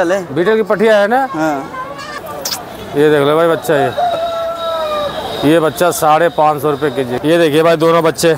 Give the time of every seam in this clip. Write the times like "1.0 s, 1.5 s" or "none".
2.1 s, 7.1 s